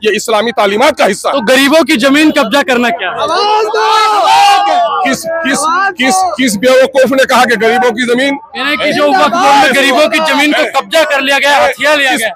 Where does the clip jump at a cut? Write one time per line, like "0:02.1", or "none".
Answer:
none